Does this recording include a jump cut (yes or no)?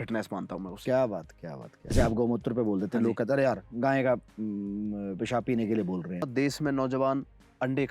yes